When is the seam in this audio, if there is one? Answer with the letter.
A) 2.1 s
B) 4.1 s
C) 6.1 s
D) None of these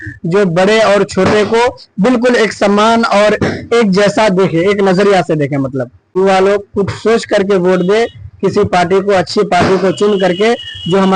C